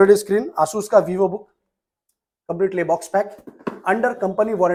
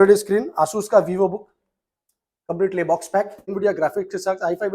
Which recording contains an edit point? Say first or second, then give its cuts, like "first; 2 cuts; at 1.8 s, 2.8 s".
second; 1 cut; at 3.5 s